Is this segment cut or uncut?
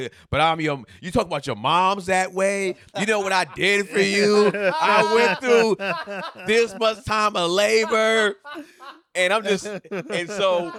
uncut